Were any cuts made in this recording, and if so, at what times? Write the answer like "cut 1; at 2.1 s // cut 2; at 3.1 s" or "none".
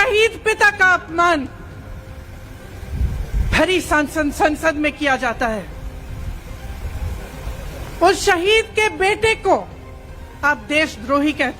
none